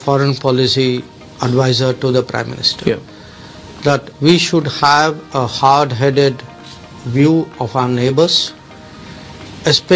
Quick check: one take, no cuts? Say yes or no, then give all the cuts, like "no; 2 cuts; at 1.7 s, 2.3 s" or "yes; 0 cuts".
yes; 0 cuts